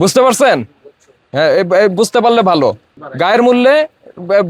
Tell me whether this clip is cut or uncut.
uncut